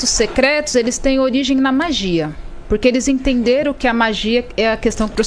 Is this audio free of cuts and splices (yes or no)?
yes